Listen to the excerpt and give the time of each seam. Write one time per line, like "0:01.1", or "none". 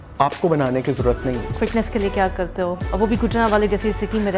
0:01.5
0:02.8